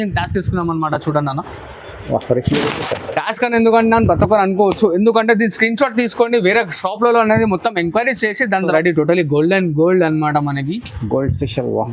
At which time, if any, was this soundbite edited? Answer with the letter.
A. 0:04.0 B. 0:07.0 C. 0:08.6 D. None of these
C